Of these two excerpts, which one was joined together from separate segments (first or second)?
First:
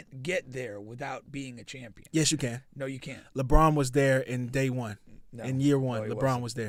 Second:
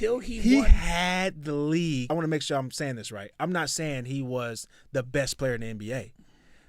second